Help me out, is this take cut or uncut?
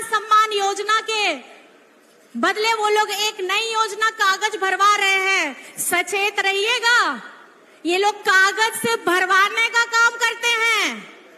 uncut